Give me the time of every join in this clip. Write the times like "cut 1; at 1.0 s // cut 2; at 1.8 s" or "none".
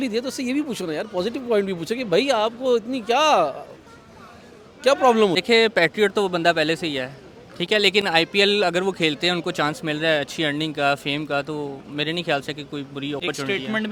none